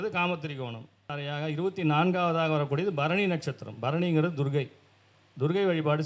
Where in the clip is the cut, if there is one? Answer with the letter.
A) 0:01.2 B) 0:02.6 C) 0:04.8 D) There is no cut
A